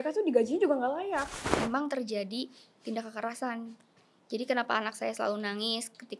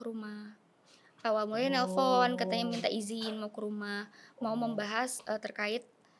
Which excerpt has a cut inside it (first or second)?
first